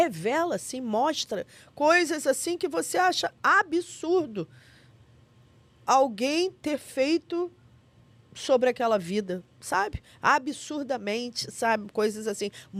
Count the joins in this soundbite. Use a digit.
0